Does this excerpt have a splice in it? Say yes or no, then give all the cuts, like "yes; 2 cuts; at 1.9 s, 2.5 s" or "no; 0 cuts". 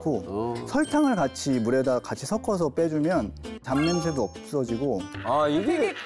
yes; 2 cuts; at 3.5 s, 5.1 s